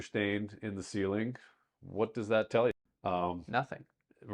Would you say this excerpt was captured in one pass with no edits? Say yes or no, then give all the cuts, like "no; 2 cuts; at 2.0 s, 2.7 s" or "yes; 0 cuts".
no; 1 cut; at 2.9 s